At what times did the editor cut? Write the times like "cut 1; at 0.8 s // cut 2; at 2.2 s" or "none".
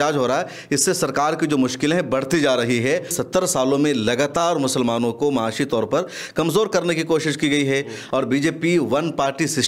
cut 1; at 3.2 s // cut 2; at 8.0 s